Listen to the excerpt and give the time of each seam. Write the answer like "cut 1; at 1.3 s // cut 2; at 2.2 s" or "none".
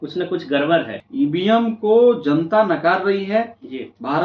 cut 1; at 1.0 s